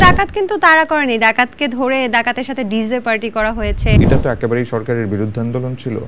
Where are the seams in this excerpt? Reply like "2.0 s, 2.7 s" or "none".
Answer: 4.0 s